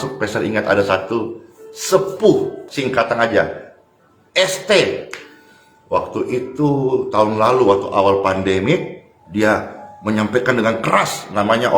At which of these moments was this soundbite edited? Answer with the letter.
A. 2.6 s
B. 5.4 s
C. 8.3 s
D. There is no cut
A